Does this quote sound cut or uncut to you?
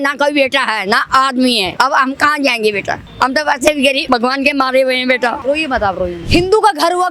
cut